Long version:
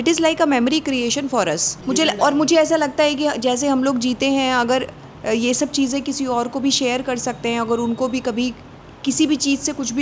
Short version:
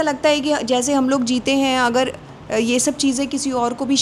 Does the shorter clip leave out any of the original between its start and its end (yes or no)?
no